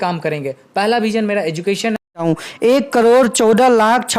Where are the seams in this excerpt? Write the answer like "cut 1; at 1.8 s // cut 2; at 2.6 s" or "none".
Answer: cut 1; at 2.2 s